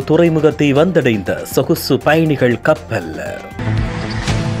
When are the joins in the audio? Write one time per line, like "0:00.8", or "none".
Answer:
0:03.4